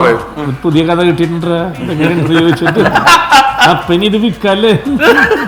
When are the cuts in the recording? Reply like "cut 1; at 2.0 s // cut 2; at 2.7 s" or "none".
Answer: none